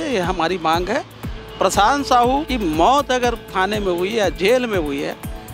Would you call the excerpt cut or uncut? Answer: cut